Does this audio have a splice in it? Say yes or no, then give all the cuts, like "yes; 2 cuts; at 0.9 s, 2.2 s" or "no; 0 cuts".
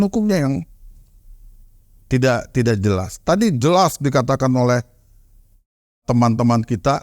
no; 0 cuts